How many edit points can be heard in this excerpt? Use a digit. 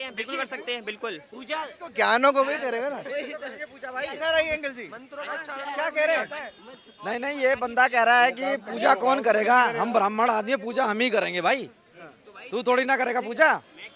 0